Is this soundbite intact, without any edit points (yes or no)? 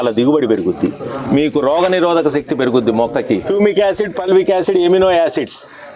no